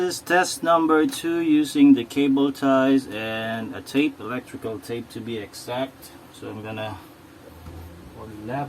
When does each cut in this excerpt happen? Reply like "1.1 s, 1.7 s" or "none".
7.5 s